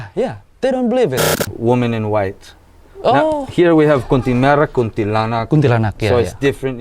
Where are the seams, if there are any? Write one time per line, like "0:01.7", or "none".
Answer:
0:01.4